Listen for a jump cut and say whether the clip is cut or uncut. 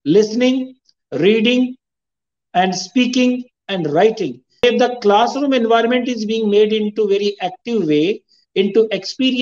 cut